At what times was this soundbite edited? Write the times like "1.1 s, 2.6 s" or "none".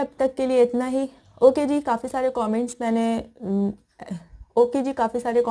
4.5 s